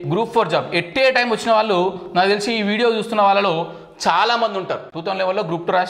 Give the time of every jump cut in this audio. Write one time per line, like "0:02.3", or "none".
0:04.9